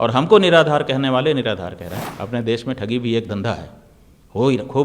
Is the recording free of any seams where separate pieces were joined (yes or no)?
no